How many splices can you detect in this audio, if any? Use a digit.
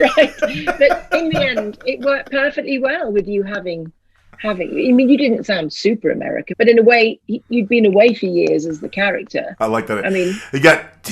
1